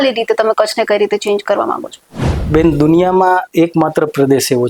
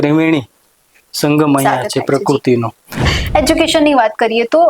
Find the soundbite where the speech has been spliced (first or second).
second